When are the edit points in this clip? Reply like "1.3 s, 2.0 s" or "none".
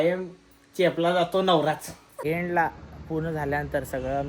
2.1 s